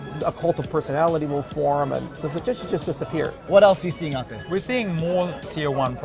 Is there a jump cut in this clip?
yes; 3 cuts; at 2.2 s, 3.4 s, 4.4 s

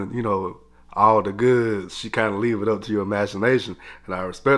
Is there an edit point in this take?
no; 0 cuts

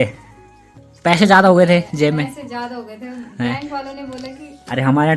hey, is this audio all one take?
yes; 0 cuts

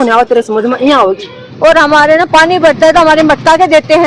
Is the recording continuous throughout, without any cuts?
no; 1 cut; at 1.4 s

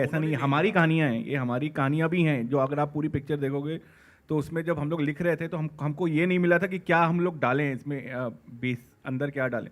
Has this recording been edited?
no; 0 cuts

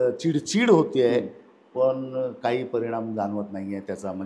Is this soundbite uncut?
yes; 0 cuts

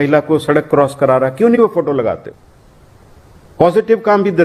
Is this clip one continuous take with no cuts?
yes; 0 cuts

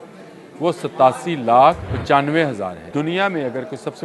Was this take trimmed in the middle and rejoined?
yes; 2 cuts; at 1.9 s, 2.8 s

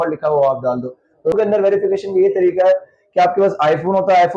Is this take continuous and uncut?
no; 1 cut; at 1.3 s

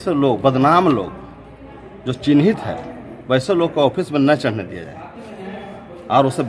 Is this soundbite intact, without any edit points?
yes; 0 cuts

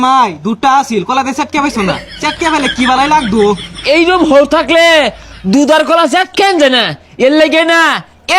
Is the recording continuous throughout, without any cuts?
yes; 0 cuts

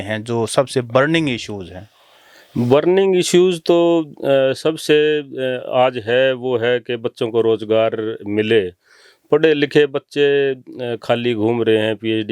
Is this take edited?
no; 0 cuts

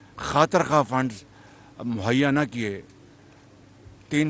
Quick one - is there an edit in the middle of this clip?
no; 0 cuts

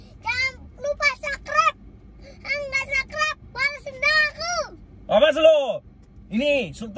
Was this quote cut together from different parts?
no; 0 cuts

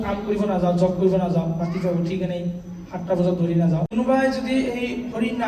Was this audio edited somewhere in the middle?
yes; 1 cut; at 3.9 s

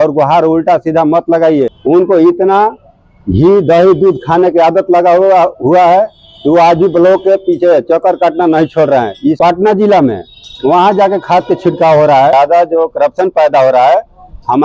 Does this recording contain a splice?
yes; 3 cuts; at 1.8 s, 9.4 s, 12.3 s

